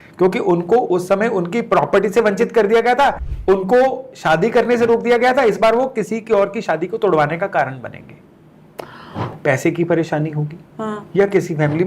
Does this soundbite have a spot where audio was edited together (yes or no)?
yes